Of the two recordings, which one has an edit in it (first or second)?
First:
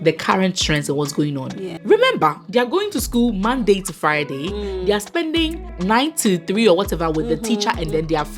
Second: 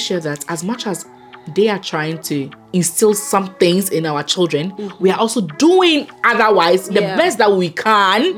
first